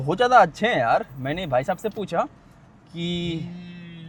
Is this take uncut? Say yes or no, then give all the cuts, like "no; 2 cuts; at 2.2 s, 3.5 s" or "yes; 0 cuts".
yes; 0 cuts